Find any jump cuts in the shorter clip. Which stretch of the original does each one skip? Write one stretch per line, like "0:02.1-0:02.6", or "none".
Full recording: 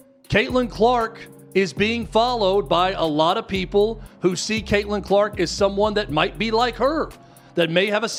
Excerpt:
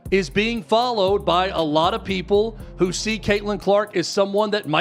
none